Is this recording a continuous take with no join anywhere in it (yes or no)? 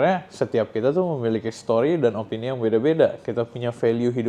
yes